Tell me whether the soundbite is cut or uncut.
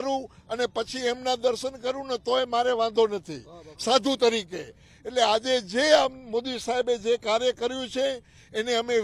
uncut